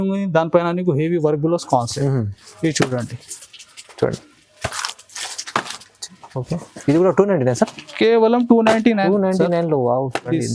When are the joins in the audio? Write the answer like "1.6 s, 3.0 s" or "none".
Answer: none